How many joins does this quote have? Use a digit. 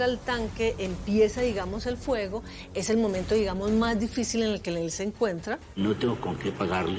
1